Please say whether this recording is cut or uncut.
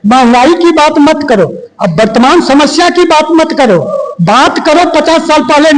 uncut